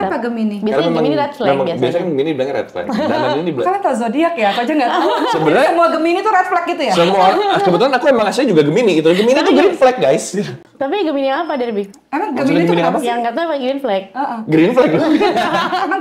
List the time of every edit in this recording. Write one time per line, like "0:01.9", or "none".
none